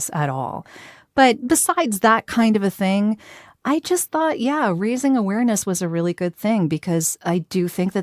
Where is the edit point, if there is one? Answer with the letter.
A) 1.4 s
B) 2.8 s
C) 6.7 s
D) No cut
A